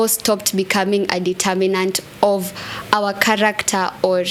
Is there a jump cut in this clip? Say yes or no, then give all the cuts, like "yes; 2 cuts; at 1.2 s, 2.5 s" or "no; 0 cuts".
no; 0 cuts